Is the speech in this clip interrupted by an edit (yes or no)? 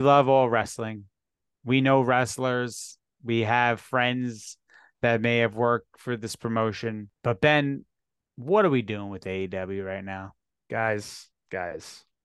yes